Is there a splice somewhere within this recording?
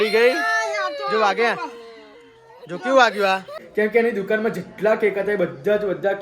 yes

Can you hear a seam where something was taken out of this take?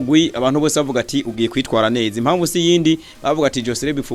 no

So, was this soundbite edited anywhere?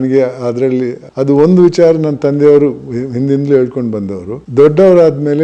yes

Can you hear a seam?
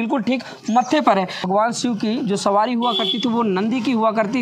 yes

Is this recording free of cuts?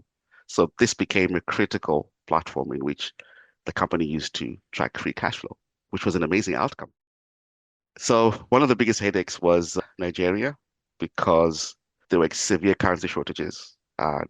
no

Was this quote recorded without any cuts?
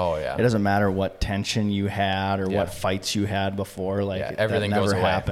yes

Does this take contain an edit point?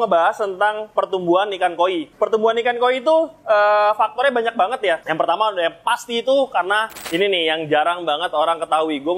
yes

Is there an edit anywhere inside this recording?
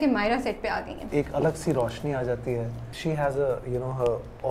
yes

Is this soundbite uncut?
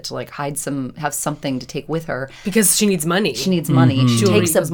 yes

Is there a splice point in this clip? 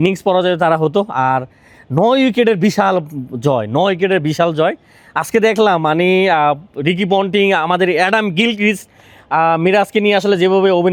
no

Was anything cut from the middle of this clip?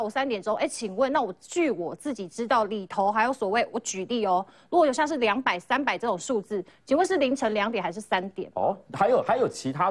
no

